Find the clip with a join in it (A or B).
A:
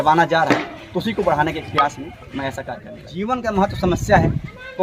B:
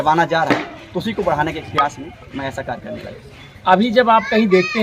A